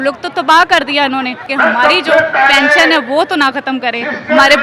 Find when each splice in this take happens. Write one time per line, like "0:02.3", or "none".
0:01.4